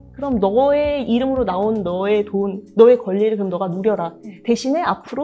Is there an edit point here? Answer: no; 0 cuts

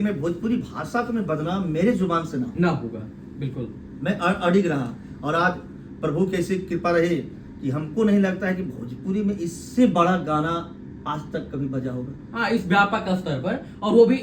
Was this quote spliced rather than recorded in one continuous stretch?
no; 0 cuts

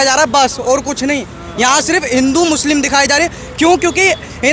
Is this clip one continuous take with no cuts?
yes; 0 cuts

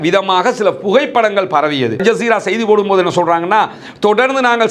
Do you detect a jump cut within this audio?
yes; 1 cut; at 2.0 s

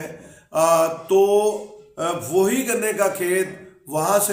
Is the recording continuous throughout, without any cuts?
yes; 0 cuts

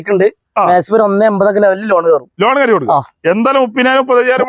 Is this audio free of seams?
yes; 0 cuts

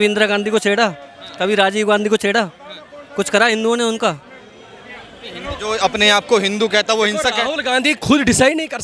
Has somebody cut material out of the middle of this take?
no; 0 cuts

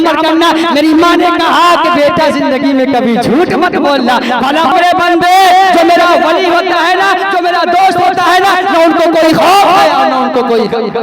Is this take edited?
yes; 1 cut; at 4.7 s

